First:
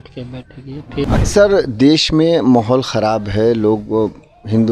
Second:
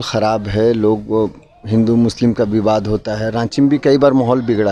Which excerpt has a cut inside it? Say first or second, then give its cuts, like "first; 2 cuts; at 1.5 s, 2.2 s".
first; 1 cut; at 1.1 s